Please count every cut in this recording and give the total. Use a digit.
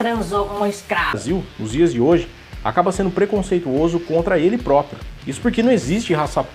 1